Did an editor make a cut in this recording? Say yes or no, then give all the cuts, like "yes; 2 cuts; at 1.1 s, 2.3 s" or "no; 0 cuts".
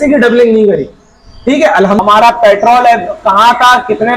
yes; 1 cut; at 2.0 s